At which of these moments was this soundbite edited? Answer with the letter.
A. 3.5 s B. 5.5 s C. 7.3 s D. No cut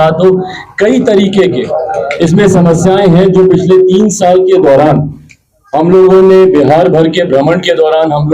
D